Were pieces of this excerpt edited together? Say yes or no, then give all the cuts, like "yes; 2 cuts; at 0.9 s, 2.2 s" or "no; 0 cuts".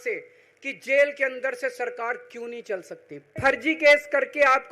yes; 1 cut; at 3.4 s